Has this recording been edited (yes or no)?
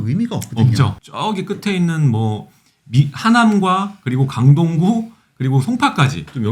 yes